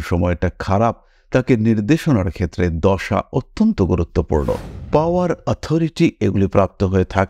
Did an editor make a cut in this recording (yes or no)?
yes